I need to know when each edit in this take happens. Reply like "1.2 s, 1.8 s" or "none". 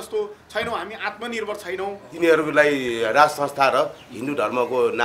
2.0 s